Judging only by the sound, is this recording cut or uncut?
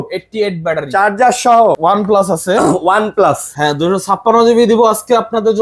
cut